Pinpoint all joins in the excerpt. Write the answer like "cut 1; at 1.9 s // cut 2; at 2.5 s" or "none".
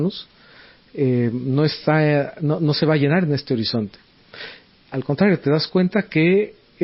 none

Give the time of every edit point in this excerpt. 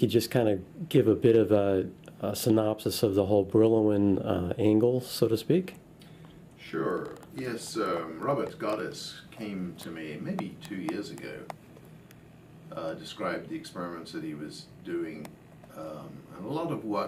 cut 1; at 4.2 s

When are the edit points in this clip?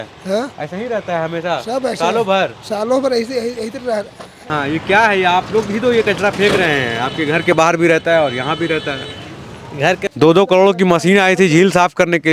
cut 1; at 4.4 s // cut 2; at 10.0 s

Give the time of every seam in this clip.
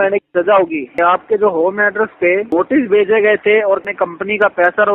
cut 1; at 0.9 s // cut 2; at 2.5 s // cut 3; at 3.8 s

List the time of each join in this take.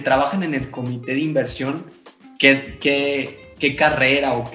none

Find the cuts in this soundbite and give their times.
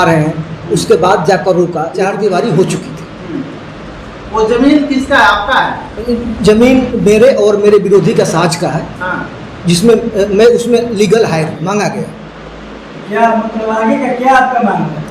cut 1; at 1.9 s // cut 2; at 11.5 s

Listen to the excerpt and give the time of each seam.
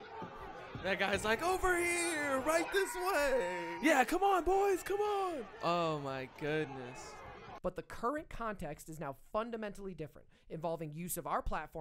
cut 1; at 7.4 s

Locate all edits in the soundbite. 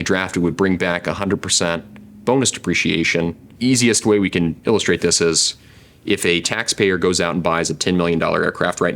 cut 1; at 3.4 s

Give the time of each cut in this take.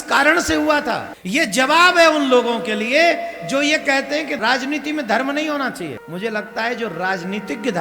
cut 1; at 1.1 s // cut 2; at 4.4 s // cut 3; at 6.0 s

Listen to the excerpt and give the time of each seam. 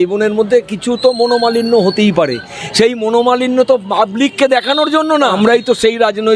cut 1; at 5.3 s

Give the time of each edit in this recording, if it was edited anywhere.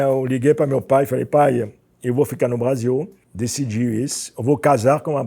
cut 1; at 3.2 s

